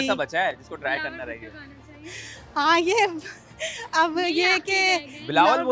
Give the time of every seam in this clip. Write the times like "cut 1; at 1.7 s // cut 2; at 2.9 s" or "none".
none